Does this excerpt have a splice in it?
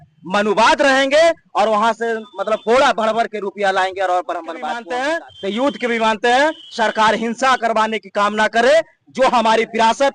yes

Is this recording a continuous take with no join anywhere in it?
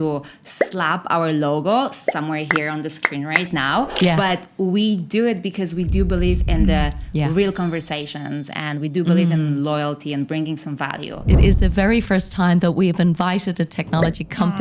no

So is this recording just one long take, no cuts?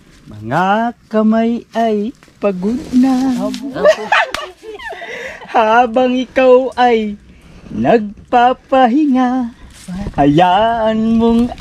yes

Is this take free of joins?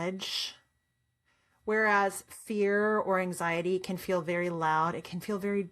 yes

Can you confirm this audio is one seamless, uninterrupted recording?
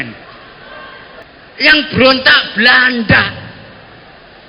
no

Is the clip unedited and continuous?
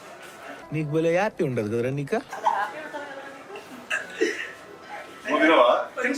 yes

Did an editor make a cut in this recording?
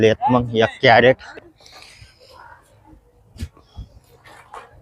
yes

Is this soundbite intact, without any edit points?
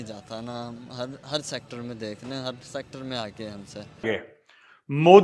no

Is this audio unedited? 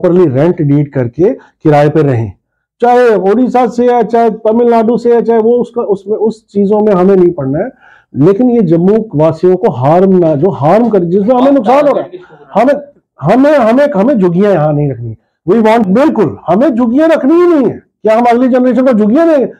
no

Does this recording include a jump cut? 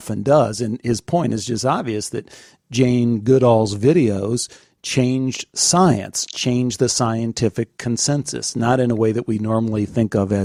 no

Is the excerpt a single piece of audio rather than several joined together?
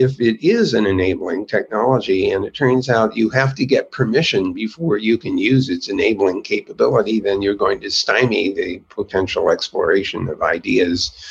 yes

